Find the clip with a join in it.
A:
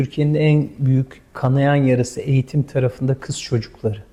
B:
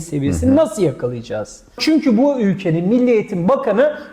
B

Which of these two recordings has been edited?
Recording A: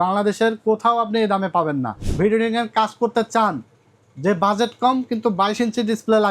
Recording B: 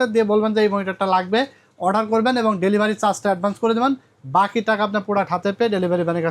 A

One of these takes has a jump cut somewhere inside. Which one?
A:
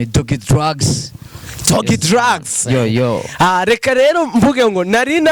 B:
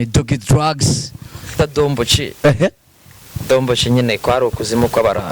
B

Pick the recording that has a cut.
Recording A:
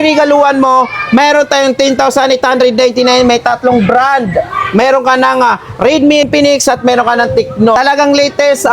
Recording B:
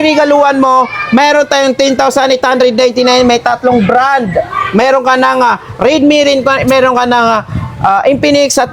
A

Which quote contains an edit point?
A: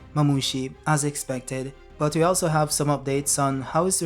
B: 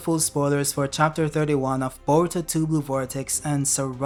A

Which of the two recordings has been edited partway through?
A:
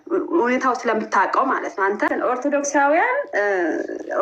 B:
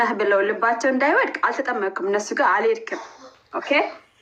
A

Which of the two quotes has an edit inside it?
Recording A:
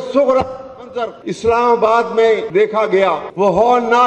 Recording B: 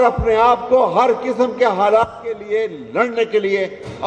A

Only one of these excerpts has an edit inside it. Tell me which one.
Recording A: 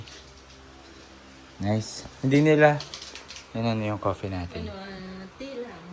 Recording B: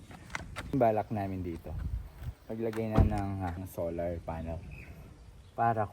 B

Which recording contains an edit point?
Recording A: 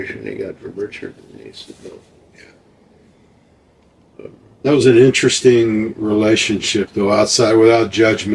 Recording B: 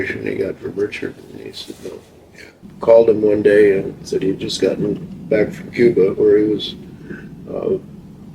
B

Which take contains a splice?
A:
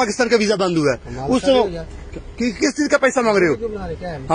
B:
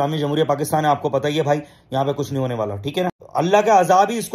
B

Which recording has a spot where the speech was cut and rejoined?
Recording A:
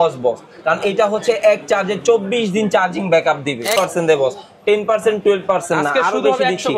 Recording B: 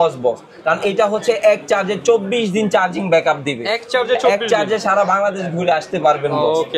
A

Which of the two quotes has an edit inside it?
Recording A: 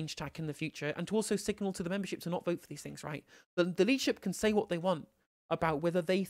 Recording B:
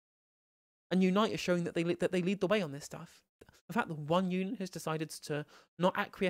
B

